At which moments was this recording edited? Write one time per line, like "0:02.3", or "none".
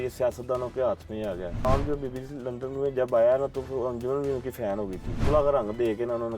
0:01.6
0:05.2